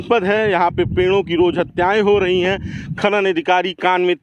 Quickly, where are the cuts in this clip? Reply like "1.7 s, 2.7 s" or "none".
none